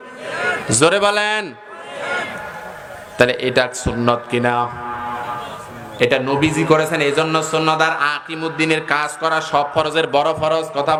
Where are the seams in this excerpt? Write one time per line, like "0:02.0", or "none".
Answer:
none

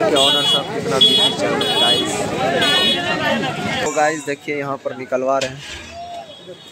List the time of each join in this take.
0:03.9

